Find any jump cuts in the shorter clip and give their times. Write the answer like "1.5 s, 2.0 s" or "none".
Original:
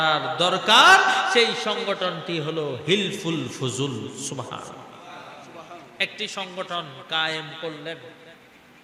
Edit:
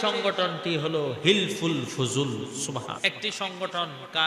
3.0 s